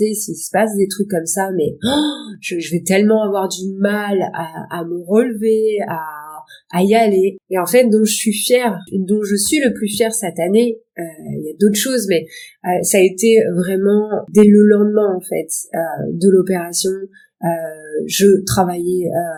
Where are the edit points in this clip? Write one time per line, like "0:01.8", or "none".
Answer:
none